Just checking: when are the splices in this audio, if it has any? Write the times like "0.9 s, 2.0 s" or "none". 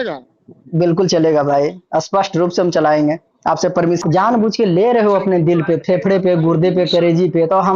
4.0 s